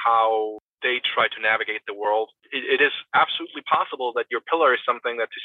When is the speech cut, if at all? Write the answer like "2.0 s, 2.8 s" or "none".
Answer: none